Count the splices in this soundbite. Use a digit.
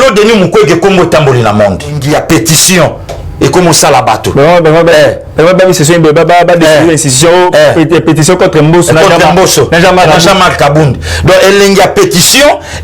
1